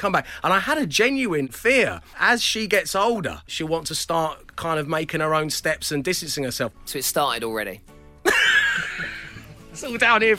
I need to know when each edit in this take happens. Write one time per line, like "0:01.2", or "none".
0:01.8
0:03.5
0:06.8